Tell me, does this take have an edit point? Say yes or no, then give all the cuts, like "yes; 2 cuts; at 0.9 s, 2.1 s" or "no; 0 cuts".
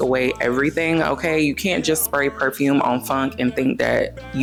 no; 0 cuts